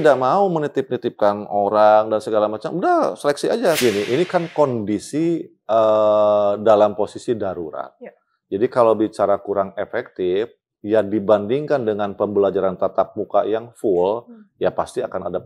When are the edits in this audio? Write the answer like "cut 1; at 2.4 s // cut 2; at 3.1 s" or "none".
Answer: cut 1; at 3.8 s